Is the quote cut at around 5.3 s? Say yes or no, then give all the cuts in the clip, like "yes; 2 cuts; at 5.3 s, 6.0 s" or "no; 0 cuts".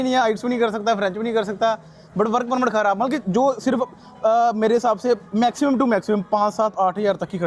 no; 0 cuts